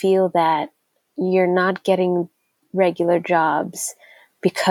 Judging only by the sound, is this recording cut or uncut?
uncut